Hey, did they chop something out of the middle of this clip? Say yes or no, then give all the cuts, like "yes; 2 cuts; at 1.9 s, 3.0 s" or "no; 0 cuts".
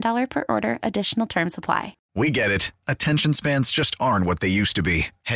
yes; 1 cut; at 2.0 s